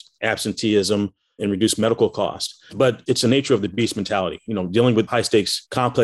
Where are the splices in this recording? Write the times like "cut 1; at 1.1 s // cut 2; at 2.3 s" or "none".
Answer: cut 1; at 3.0 s // cut 2; at 5.1 s